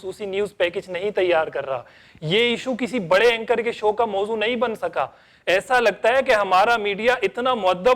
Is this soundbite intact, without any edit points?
yes; 0 cuts

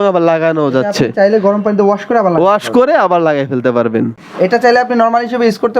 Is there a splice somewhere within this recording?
yes; 1 cut; at 4.2 s

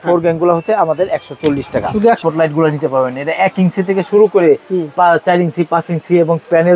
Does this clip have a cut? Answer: yes; 1 cut; at 2.2 s

